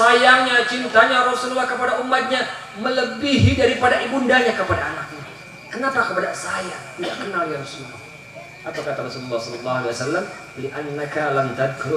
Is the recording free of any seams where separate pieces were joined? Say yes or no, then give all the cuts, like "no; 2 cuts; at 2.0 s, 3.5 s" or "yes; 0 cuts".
yes; 0 cuts